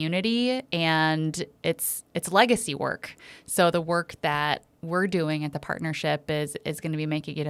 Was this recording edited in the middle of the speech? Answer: no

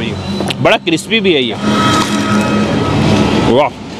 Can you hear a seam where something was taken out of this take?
yes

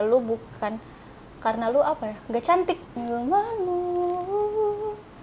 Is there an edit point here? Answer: yes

